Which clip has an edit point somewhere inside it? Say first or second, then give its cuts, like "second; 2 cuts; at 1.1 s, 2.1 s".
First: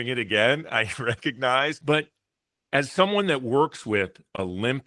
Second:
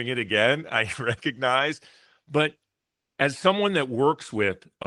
first; 1 cut; at 1.8 s